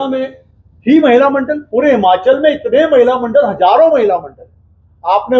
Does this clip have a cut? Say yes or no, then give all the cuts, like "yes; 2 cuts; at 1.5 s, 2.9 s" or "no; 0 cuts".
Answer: no; 0 cuts